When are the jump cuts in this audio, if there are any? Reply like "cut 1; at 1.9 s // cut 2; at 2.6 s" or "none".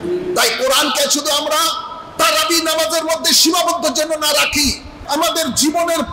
cut 1; at 4.9 s

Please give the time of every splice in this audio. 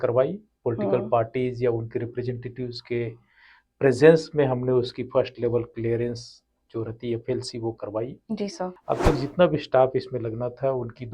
cut 1; at 8.8 s

